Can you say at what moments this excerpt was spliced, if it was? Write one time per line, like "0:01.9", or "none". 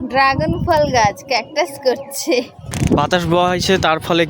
0:02.7